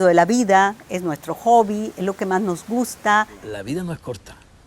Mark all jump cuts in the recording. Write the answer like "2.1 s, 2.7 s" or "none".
3.5 s